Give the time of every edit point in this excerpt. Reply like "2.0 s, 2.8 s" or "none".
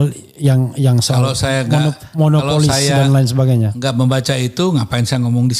none